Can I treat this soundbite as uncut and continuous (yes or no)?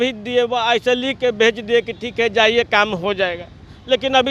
yes